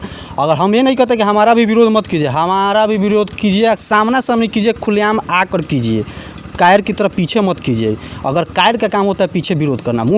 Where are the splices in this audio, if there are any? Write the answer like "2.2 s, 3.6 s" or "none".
none